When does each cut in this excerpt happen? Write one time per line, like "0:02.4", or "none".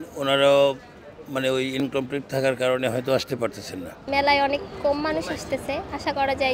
0:04.0